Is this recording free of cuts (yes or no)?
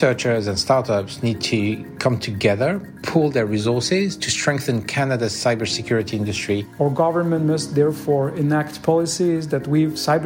no